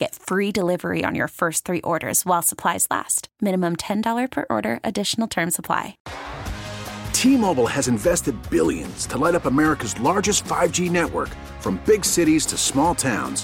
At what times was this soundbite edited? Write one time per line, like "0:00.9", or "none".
0:06.0